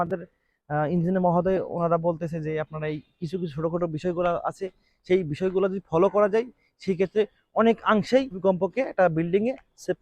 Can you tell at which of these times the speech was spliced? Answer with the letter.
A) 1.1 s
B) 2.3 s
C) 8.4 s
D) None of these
C